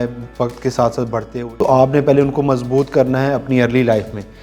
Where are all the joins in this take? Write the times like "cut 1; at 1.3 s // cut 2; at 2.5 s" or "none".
cut 1; at 1.3 s

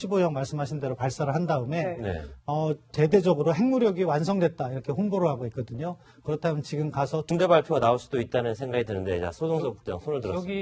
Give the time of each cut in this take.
none

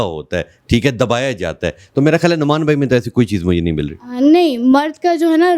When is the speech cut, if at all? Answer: none

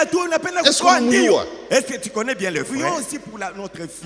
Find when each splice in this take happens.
cut 1; at 2.7 s

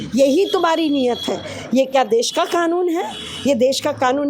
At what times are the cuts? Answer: none

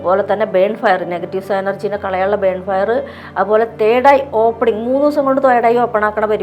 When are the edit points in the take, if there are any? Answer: none

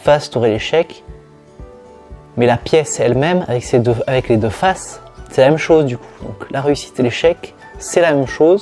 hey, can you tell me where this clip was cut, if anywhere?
none

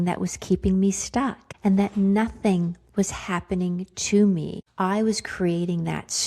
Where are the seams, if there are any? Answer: cut 1; at 1.4 s // cut 2; at 4.6 s

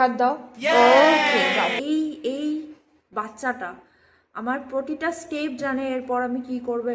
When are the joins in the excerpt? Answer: cut 1; at 1.8 s

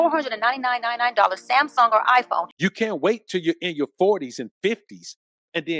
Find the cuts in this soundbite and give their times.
cut 1; at 2.5 s

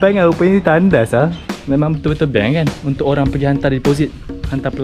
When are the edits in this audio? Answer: cut 1; at 1.5 s

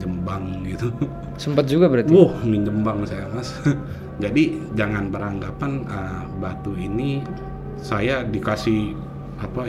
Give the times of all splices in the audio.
none

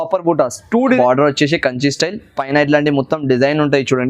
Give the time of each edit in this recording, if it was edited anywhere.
cut 1; at 1.0 s

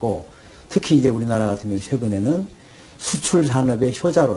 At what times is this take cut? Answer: cut 1; at 1.2 s

